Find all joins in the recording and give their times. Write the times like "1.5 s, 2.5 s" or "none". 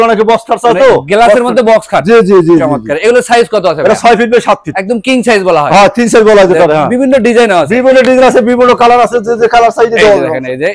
none